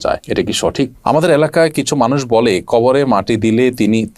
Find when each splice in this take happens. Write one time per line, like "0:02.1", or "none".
0:01.0

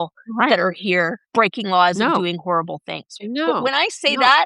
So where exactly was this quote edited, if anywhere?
0:01.2
0:03.2

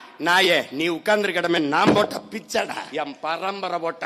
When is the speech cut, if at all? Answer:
0:02.8

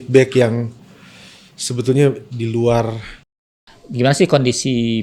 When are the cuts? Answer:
0:03.3

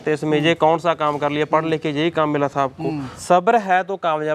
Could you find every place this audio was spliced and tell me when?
0:03.1

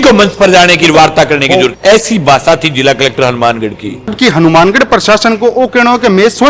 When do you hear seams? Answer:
0:01.8
0:04.2

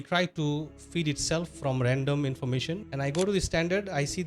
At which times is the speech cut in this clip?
0:02.8

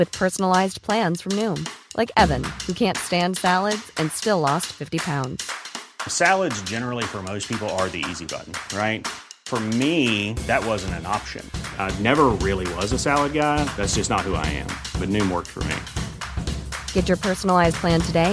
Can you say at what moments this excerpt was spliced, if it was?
none

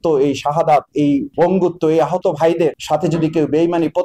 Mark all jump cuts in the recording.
0:01.3
0:02.8

